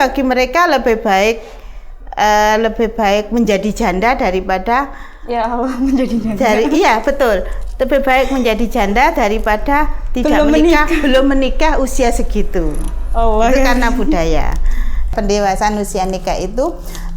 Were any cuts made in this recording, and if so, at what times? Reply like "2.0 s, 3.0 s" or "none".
15.1 s